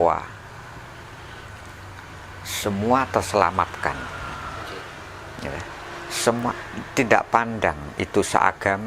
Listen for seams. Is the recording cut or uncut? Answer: uncut